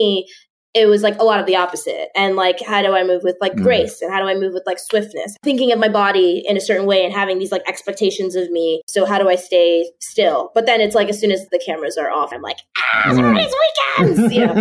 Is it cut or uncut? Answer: cut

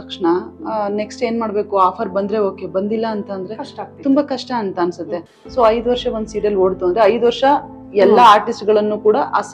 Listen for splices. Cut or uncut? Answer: uncut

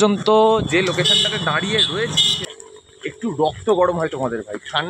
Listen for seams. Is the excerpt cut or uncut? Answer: cut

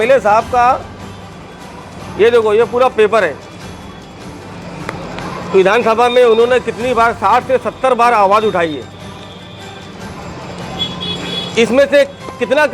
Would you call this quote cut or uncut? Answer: uncut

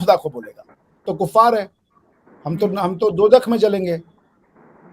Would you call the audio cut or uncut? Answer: cut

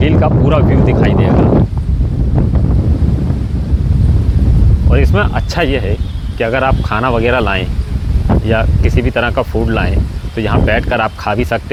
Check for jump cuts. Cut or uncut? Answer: uncut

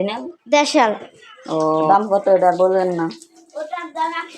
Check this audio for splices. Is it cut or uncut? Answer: cut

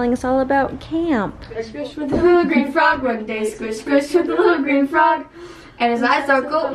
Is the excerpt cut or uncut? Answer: cut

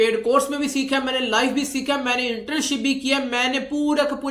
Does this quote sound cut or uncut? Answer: uncut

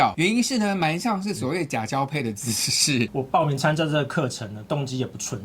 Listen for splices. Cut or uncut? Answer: cut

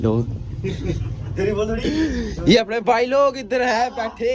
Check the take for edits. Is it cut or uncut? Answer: uncut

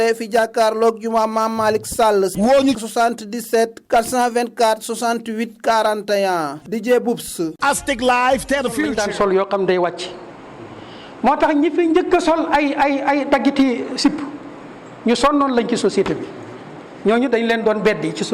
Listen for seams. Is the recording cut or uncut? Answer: cut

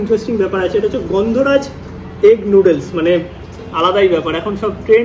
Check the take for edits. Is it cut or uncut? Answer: uncut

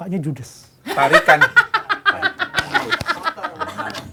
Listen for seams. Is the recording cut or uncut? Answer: uncut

